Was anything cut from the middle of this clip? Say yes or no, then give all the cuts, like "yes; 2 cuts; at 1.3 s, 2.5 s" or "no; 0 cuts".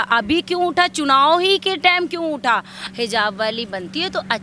yes; 1 cut; at 2.8 s